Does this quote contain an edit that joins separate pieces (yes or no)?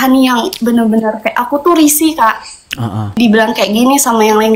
yes